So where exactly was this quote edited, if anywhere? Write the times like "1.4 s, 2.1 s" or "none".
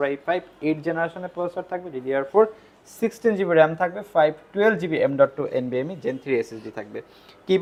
none